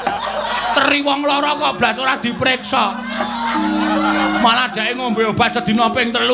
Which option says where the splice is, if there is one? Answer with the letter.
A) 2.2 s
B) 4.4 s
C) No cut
B